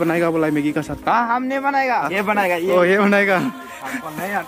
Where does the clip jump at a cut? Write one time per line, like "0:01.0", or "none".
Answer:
0:02.1